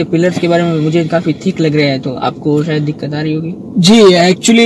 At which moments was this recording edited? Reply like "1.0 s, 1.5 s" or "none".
none